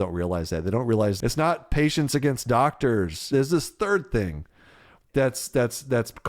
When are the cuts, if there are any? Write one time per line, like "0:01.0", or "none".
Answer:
0:01.2
0:03.2